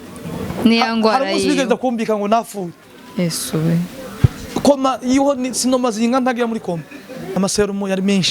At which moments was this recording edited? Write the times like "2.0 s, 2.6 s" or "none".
7.3 s